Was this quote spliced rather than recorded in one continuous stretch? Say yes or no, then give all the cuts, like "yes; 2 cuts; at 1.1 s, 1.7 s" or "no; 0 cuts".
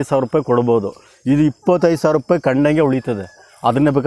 no; 0 cuts